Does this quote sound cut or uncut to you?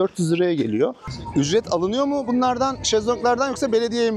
cut